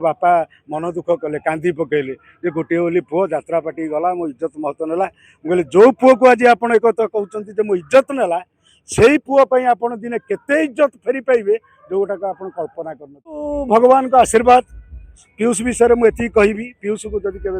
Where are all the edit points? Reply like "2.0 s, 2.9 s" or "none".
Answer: 13.5 s